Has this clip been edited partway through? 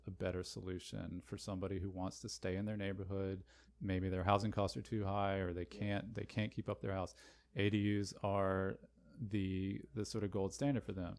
yes; 1 cut; at 3.2 s

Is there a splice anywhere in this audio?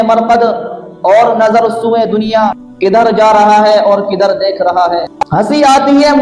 yes; 1 cut; at 5.3 s

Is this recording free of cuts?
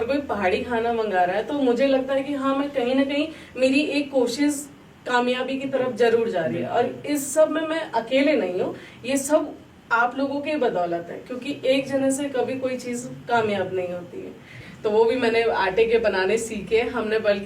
no; 1 cut; at 14.6 s

